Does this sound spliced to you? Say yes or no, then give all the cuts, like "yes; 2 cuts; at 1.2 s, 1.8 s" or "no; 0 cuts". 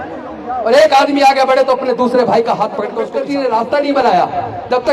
yes; 1 cut; at 3.1 s